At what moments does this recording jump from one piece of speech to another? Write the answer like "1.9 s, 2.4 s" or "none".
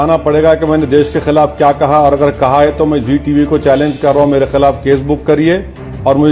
none